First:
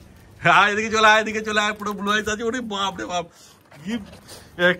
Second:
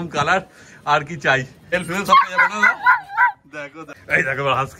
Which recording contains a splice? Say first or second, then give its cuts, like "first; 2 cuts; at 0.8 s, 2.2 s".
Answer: second; 2 cuts; at 1.7 s, 3.9 s